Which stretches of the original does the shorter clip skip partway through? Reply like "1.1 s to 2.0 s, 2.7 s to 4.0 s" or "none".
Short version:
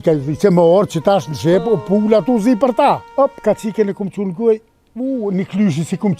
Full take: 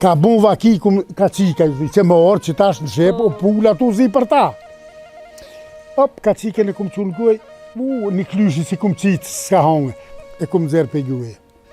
4.6 s to 5.9 s